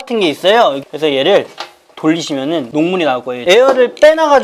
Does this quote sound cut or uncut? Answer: cut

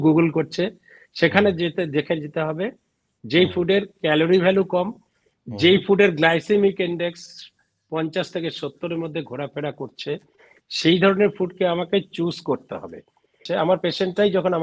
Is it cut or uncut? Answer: cut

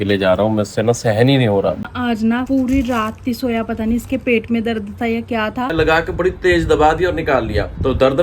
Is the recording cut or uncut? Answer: cut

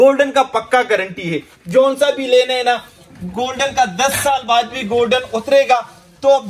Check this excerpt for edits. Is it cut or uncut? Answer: uncut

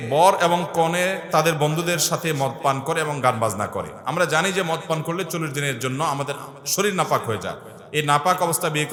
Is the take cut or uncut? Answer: uncut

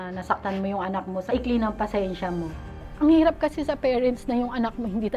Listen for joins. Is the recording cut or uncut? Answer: cut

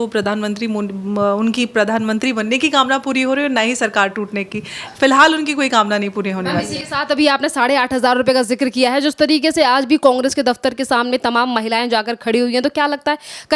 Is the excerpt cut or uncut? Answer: uncut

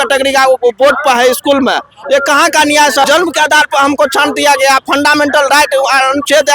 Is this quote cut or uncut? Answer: cut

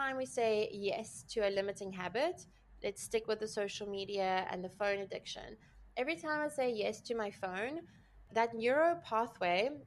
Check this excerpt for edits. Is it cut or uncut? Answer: cut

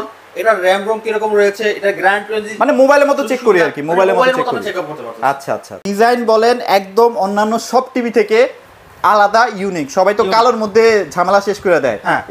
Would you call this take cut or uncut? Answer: cut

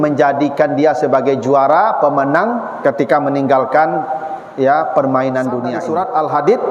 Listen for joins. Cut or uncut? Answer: cut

